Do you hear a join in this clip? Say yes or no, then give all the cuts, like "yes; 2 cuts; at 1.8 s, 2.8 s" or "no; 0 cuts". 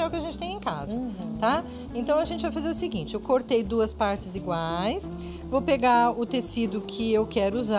yes; 1 cut; at 5.9 s